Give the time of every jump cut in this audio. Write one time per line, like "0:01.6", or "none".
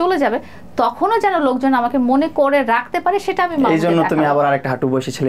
none